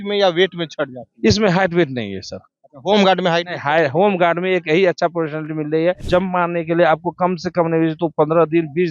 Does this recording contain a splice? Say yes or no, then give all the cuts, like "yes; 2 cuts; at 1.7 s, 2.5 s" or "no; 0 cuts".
yes; 1 cut; at 6.0 s